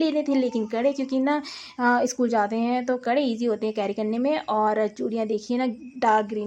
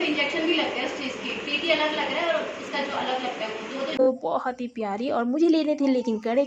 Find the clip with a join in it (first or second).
second